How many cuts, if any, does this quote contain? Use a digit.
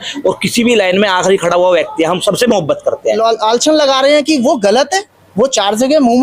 1